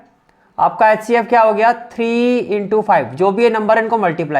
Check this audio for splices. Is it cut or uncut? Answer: uncut